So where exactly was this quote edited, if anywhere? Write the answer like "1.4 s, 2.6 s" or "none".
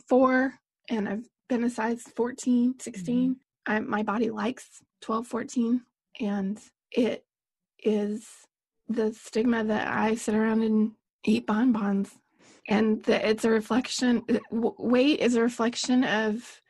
1.3 s, 3.5 s, 6.7 s, 11.1 s